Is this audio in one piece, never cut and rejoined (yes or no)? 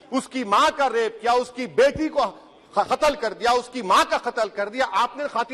yes